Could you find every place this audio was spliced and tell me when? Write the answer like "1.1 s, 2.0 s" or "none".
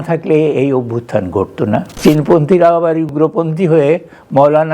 1.9 s

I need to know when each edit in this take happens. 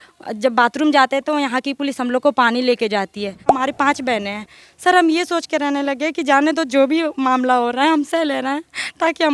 3.5 s

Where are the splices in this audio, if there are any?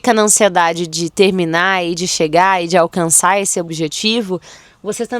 3.7 s

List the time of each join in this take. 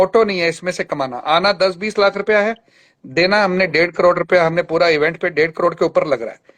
none

